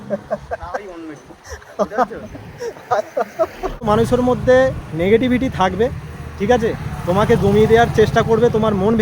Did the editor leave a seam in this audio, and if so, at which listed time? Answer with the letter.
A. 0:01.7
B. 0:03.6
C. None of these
B